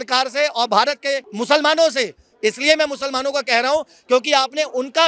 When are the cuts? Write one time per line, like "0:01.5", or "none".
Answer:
0:01.3